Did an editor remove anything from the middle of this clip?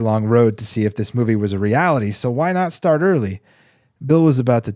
no; 0 cuts

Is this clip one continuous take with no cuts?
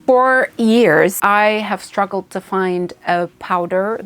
no; 1 cut; at 1.2 s

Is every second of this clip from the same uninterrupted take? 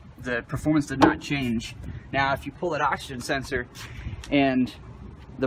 no; 1 cut; at 3.1 s

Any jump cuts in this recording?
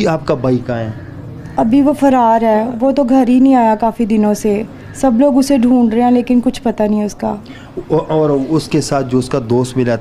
no; 0 cuts

